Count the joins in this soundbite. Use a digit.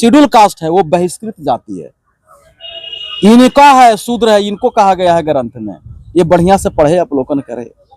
0